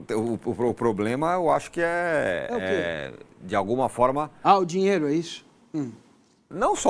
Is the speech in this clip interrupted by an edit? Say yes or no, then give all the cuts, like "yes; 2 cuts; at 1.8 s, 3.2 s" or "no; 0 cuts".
no; 0 cuts